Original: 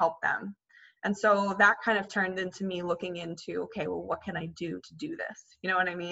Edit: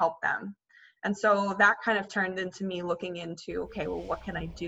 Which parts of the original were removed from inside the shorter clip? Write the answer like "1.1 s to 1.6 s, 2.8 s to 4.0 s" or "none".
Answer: none